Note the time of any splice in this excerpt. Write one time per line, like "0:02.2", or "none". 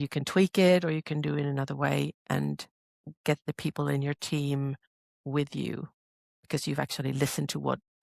none